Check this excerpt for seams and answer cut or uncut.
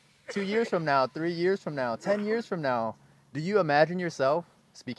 uncut